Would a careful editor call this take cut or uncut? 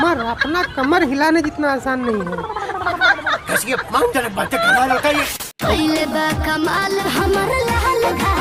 cut